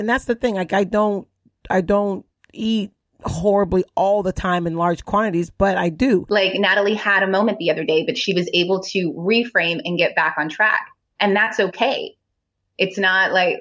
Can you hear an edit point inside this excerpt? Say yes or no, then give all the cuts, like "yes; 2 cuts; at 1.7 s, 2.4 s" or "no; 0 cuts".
yes; 1 cut; at 6.3 s